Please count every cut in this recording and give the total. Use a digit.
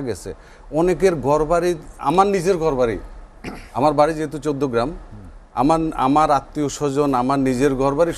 0